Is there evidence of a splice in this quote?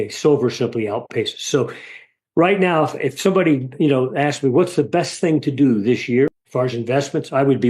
yes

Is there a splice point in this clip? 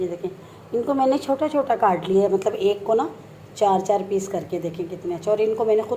no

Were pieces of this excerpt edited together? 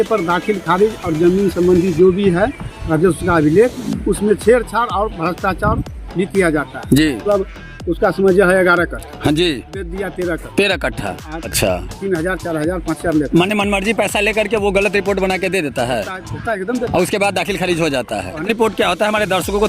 yes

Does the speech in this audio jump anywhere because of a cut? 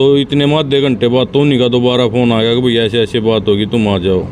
no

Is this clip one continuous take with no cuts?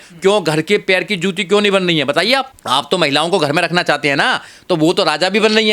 no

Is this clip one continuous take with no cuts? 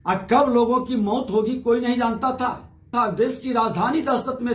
no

